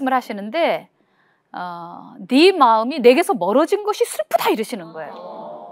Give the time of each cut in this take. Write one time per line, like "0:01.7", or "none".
none